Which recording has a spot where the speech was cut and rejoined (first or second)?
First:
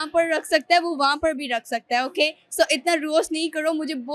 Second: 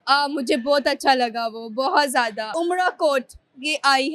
second